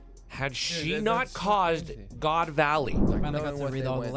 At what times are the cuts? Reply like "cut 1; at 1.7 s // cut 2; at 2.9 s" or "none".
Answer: cut 1; at 3.1 s